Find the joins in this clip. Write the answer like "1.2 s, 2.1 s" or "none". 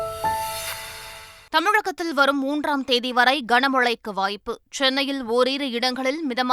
1.4 s